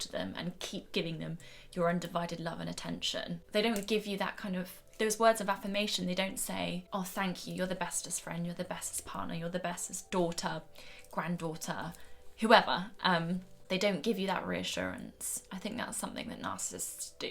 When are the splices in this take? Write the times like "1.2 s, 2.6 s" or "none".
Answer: 3.4 s, 6.8 s, 10.1 s, 13.5 s